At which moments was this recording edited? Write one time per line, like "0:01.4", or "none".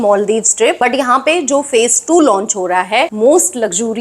0:00.8
0:03.1

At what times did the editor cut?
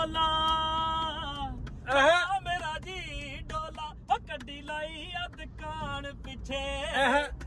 none

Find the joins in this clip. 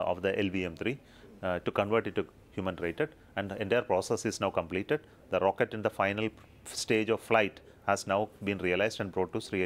0:03.8

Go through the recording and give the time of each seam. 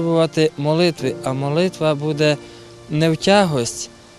none

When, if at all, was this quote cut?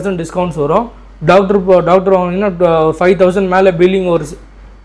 none

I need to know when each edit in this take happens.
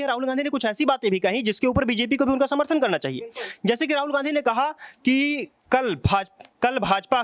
none

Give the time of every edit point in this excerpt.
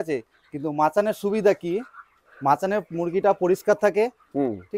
none

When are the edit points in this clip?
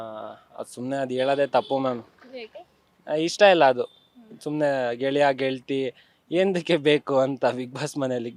none

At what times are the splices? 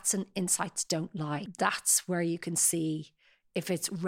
0:01.5

